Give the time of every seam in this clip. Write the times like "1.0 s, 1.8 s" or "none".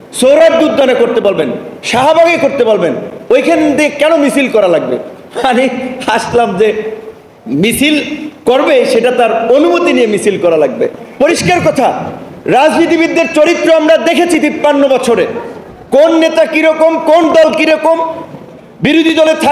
11.0 s